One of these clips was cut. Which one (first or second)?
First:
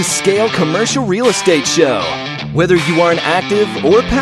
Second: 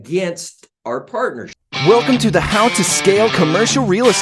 second